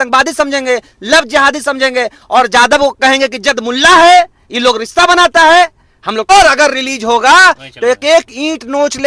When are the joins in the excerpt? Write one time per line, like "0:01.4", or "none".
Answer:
0:06.3